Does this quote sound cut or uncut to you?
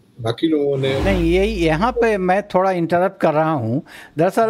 cut